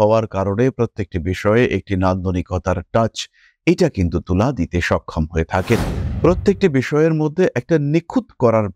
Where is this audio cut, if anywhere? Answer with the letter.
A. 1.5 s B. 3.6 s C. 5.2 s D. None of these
D